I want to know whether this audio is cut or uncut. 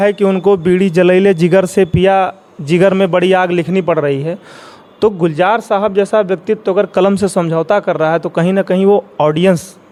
uncut